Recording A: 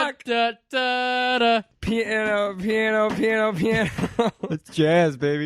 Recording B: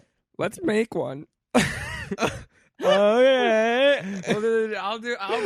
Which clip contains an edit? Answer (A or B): A